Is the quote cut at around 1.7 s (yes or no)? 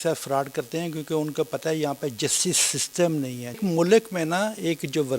no